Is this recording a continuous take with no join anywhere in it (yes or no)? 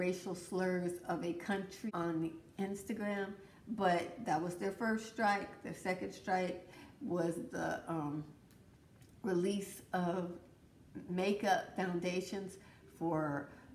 no